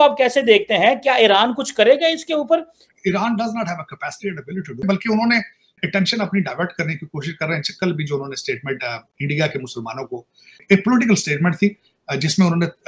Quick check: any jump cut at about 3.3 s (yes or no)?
no